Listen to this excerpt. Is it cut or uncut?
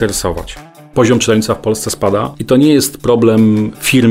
cut